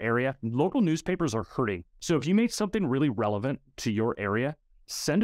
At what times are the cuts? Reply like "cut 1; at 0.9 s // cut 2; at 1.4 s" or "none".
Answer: cut 1; at 1.9 s